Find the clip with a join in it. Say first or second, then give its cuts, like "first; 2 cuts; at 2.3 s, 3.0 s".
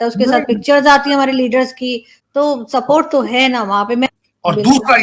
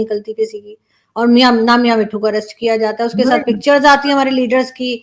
first; 1 cut; at 4.1 s